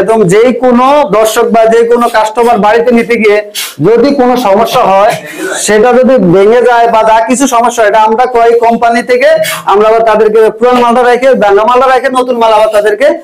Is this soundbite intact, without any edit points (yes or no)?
yes